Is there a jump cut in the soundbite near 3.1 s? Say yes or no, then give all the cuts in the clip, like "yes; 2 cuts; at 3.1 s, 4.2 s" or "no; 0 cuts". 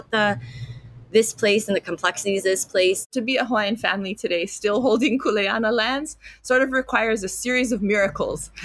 yes; 1 cut; at 3.1 s